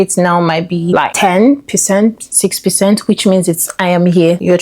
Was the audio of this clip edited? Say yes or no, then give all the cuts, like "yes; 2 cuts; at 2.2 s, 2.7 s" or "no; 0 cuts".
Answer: yes; 1 cut; at 3.6 s